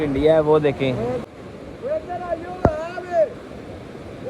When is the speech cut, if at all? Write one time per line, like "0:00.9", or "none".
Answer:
0:01.2